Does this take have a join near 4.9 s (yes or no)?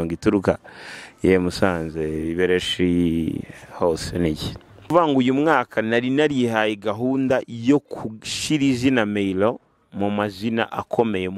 yes